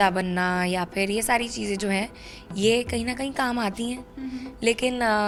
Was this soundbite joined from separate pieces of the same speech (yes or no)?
no